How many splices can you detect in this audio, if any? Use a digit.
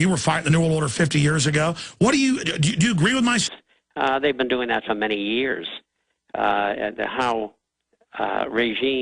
0